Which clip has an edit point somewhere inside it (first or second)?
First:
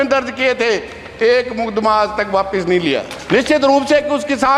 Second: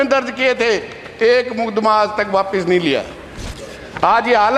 first